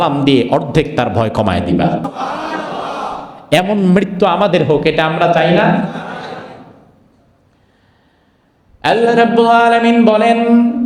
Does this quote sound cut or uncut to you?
cut